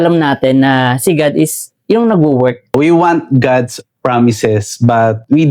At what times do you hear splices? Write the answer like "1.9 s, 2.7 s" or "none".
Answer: 2.7 s